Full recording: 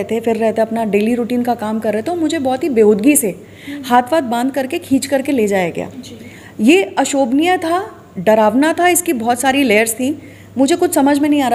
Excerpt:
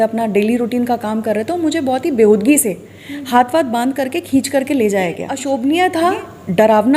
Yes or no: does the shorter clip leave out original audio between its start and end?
yes